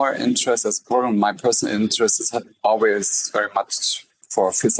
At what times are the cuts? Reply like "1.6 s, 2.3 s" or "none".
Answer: none